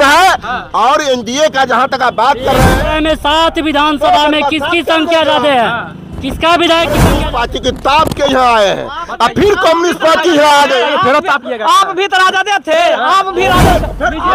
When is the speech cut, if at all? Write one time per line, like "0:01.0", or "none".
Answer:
0:02.8
0:07.2